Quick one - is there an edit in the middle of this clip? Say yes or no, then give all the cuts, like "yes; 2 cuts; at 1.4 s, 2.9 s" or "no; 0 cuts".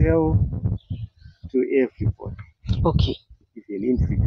no; 0 cuts